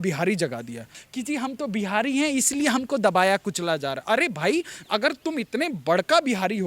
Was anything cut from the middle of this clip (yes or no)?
yes